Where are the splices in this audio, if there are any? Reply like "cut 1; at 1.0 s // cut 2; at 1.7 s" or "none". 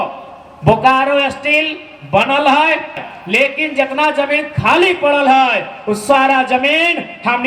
cut 1; at 3.0 s